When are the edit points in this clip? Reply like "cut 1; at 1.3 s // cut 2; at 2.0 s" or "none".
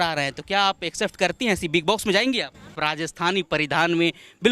cut 1; at 2.8 s